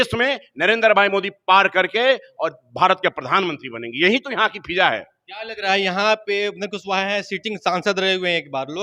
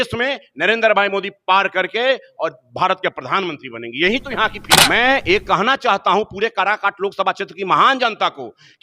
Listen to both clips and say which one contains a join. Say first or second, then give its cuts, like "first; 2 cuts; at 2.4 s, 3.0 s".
second; 1 cut; at 4.7 s